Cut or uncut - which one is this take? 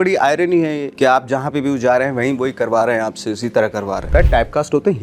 uncut